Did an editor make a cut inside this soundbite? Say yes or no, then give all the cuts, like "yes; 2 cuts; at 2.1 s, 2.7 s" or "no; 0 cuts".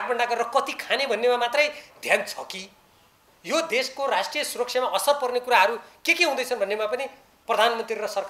no; 0 cuts